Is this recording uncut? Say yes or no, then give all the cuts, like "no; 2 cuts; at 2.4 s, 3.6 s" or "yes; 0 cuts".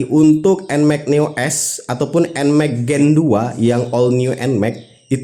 yes; 0 cuts